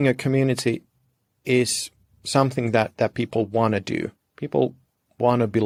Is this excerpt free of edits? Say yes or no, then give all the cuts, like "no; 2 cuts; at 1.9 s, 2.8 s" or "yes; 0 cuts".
yes; 0 cuts